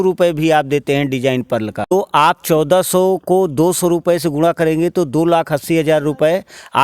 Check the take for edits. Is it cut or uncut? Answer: cut